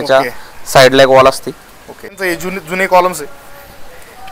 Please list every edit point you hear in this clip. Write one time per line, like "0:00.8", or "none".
0:02.2